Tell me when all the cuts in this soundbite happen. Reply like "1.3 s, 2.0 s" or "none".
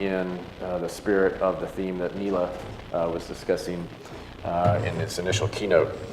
1.0 s